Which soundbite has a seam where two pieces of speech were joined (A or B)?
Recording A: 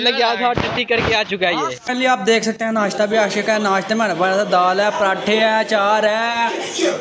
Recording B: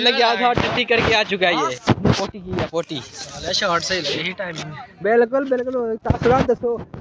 A